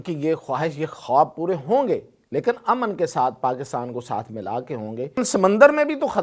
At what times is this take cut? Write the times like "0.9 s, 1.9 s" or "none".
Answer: 5.2 s